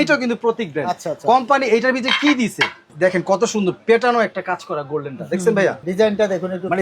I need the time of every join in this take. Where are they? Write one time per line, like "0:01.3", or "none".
0:02.8
0:05.8